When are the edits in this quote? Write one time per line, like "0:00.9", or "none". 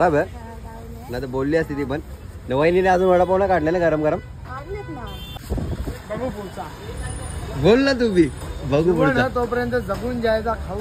0:05.2